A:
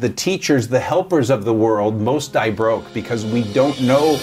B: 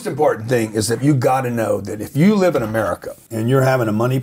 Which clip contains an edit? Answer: B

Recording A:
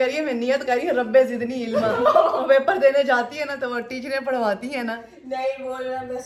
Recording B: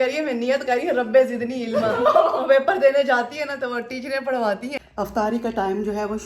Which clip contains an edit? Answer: B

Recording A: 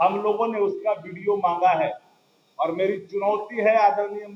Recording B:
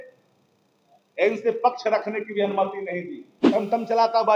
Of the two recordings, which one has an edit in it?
B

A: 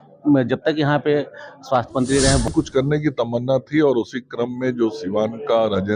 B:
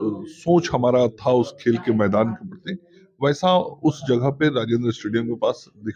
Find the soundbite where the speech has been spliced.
A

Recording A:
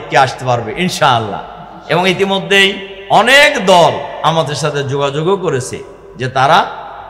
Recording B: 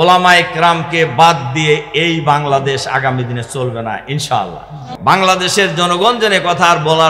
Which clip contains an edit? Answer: B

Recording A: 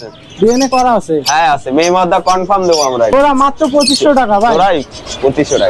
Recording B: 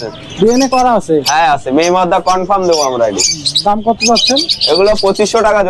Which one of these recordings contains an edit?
A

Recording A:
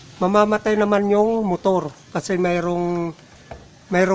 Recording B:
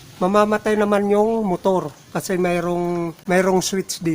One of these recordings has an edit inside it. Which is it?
B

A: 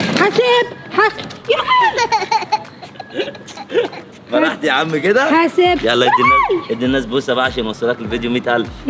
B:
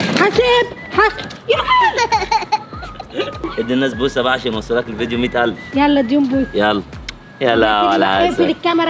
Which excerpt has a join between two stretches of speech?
B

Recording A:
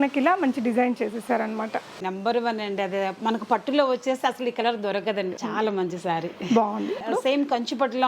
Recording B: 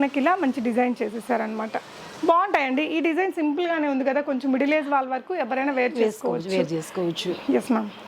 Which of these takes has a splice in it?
A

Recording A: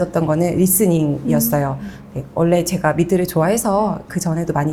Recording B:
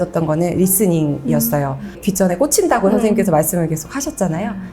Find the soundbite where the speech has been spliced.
B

